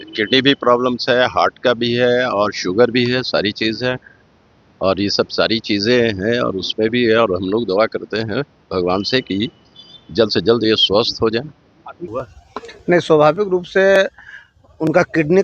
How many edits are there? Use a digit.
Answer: 1